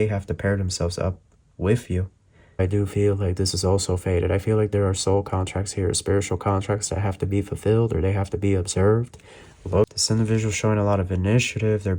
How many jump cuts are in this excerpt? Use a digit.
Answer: 2